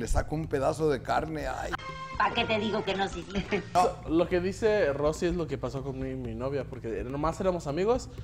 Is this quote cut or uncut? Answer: cut